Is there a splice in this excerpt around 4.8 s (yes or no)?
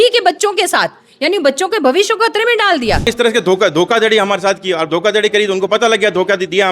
no